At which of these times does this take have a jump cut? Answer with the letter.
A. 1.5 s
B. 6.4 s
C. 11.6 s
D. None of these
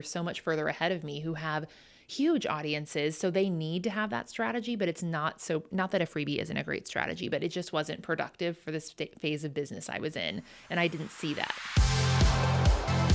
C